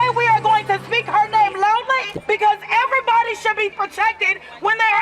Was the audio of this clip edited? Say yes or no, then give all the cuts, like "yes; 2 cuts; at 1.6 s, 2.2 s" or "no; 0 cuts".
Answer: no; 0 cuts